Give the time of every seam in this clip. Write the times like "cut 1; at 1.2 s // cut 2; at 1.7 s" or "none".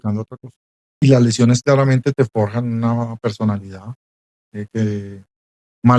cut 1; at 0.9 s